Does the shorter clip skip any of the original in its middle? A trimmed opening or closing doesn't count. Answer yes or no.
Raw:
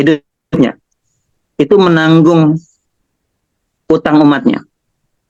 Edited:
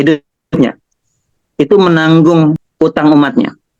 yes